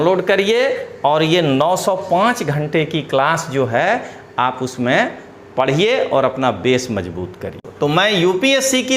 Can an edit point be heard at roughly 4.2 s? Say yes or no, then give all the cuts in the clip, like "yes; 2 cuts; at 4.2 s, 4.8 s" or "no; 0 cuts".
no; 1 cut; at 7.6 s